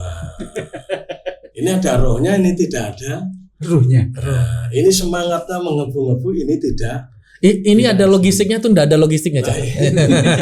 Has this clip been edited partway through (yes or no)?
no